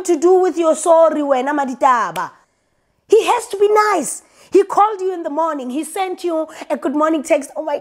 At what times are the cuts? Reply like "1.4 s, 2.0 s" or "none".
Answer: 2.5 s